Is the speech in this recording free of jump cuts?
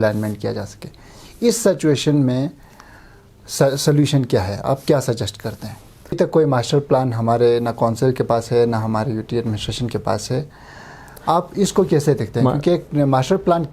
no; 1 cut; at 6.2 s

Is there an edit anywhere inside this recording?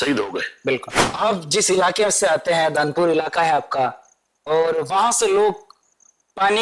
yes; 1 cut; at 1.0 s

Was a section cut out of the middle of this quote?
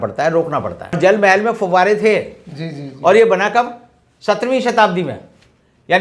yes; 1 cut; at 1.0 s

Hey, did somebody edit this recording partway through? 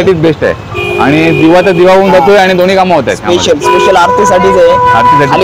no; 0 cuts

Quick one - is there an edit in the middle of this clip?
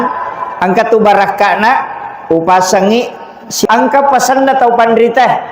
yes; 1 cut; at 3.6 s

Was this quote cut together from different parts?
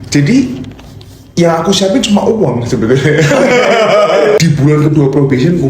yes; 1 cut; at 4.4 s

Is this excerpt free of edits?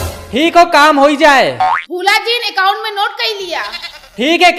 yes; 0 cuts

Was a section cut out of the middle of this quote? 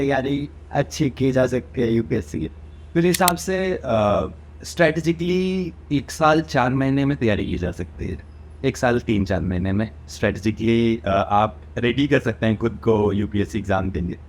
no; 0 cuts

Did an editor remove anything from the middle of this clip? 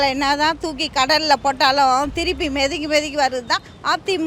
no; 0 cuts

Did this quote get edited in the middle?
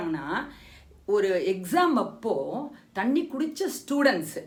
no; 0 cuts

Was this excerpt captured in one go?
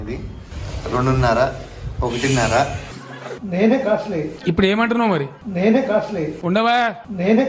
no; 1 cut; at 3.3 s

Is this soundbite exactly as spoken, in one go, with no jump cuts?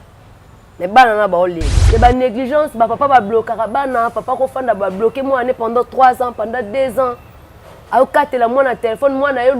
no; 1 cut; at 1.7 s

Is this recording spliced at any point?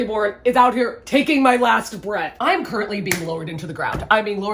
yes; 1 cut; at 2.3 s

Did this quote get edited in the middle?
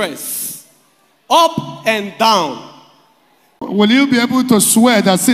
yes; 1 cut; at 3.7 s

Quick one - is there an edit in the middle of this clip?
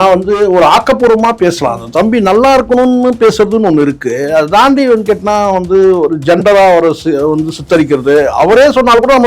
no; 0 cuts

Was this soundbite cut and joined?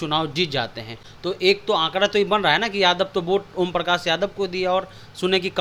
no; 0 cuts

